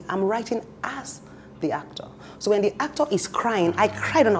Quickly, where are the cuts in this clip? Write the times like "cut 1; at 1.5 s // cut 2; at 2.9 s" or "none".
none